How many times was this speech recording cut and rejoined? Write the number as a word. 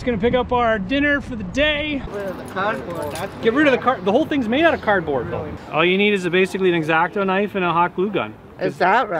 two